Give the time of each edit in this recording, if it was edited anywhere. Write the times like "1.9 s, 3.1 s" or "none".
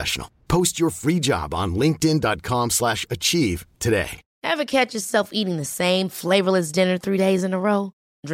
4.2 s